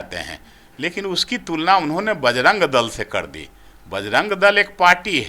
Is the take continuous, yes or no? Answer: yes